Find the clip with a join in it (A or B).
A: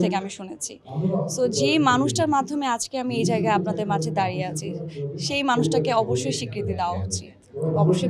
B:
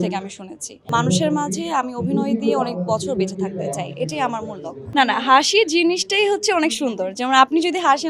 B